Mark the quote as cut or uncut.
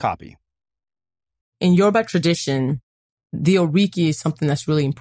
cut